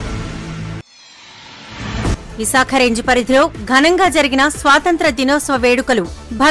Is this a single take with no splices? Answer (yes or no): yes